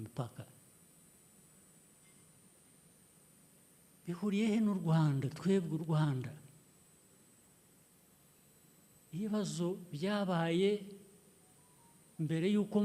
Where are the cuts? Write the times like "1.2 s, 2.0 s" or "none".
none